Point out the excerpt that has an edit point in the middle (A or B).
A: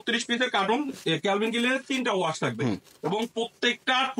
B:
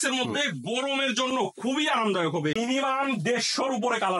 B